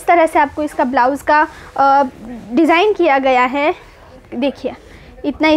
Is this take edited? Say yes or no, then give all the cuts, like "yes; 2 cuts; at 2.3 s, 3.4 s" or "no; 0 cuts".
no; 0 cuts